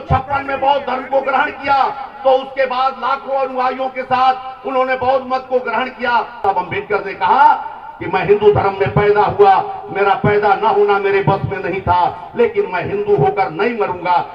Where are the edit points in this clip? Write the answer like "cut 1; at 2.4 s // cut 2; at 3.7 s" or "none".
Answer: cut 1; at 6.4 s